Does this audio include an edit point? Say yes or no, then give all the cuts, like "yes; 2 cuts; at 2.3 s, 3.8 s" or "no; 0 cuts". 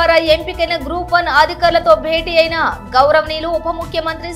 no; 0 cuts